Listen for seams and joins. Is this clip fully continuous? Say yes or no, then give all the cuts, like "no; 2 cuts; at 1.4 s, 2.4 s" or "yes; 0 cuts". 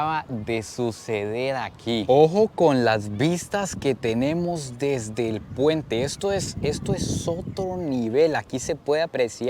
yes; 0 cuts